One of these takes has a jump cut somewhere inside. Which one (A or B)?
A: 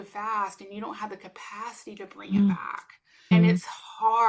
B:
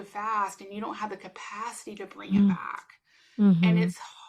A